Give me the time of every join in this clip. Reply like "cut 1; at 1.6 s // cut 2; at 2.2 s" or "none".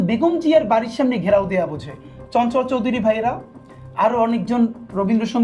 none